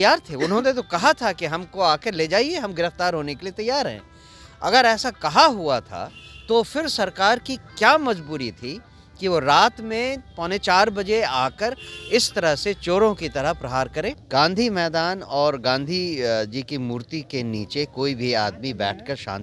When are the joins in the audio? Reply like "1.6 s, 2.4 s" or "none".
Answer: 14.2 s